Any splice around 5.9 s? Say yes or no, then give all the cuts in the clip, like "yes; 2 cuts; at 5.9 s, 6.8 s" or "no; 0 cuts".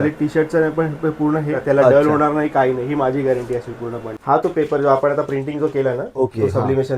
no; 2 cuts; at 1.5 s, 4.1 s